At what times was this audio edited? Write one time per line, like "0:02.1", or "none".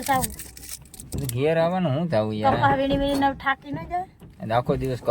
none

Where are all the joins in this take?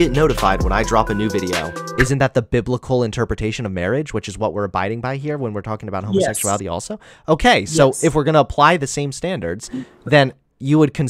0:01.8

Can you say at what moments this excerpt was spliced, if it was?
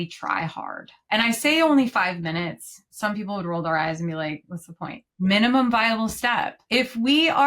0:00.9
0:05.1
0:06.6

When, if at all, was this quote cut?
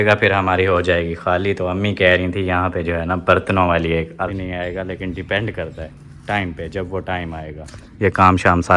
0:04.3

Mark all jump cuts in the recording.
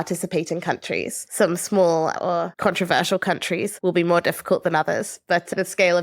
0:01.2
0:02.5
0:03.7

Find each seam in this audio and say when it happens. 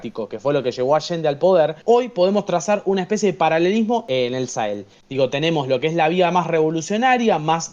0:01.8
0:04.0

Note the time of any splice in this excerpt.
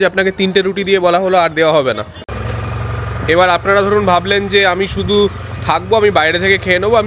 none

